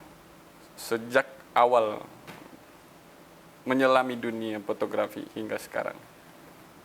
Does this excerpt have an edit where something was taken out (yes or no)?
no